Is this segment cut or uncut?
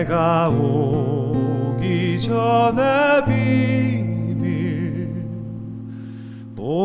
uncut